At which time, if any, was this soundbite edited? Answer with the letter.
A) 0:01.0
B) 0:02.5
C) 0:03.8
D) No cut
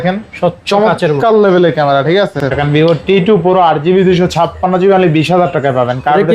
B